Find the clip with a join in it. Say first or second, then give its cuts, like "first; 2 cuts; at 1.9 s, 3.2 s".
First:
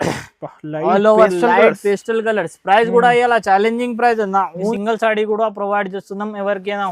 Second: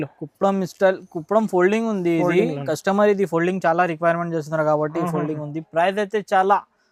first; 1 cut; at 4.7 s